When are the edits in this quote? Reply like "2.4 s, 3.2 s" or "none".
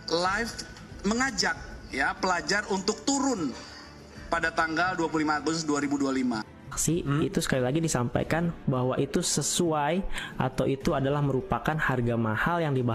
6.8 s